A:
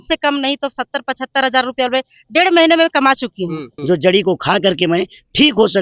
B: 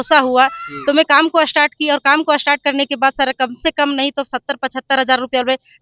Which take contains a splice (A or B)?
A